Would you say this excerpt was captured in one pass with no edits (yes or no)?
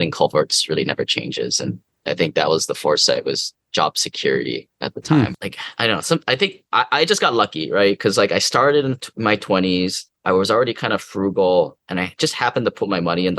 no